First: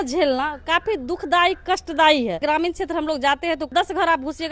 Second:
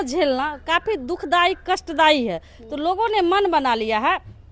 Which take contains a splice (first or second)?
first